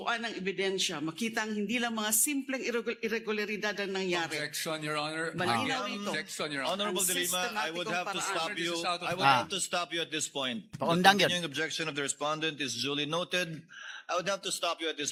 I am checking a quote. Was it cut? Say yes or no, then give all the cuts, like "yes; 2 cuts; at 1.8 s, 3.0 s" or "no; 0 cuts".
no; 0 cuts